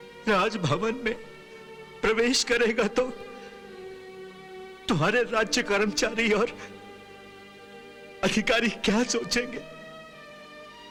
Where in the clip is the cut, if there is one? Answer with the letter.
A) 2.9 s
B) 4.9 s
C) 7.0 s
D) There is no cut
D